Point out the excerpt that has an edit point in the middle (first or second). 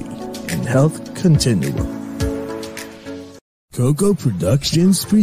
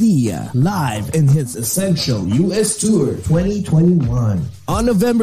first